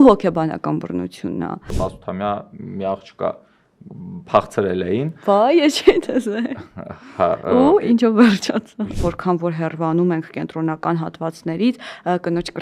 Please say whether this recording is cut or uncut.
cut